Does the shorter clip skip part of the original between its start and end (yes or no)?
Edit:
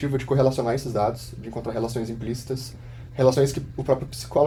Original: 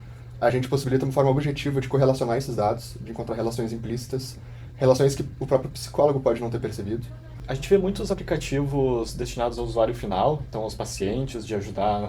no